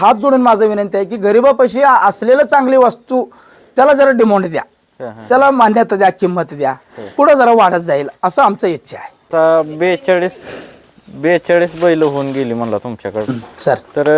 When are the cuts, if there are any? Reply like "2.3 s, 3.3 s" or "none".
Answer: none